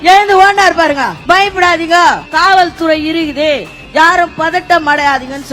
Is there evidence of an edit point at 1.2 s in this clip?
yes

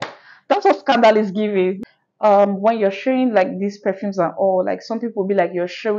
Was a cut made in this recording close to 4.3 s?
no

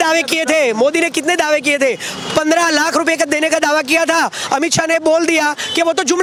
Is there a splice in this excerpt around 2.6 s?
no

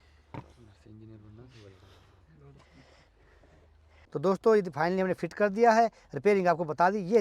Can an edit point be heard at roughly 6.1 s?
no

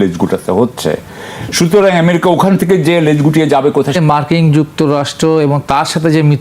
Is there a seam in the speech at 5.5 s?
no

